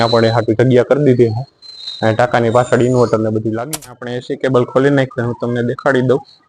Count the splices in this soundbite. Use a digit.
1